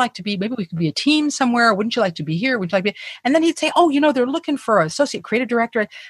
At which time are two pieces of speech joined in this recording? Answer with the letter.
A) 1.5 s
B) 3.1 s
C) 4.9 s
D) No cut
C